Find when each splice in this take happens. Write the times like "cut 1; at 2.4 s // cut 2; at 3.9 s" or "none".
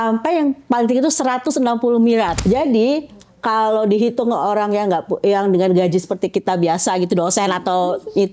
cut 1; at 2.4 s

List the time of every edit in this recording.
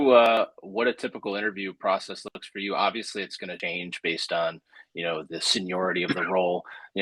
cut 1; at 3.5 s

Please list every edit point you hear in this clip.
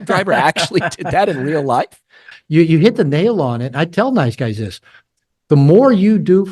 cut 1; at 2.3 s

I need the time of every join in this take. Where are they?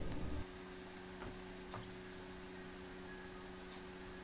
none

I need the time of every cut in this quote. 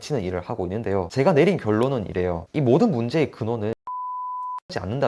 cut 1; at 1.1 s

